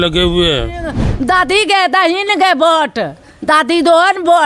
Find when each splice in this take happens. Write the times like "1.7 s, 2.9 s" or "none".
1.0 s